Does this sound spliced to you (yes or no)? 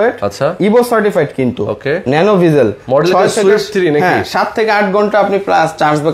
no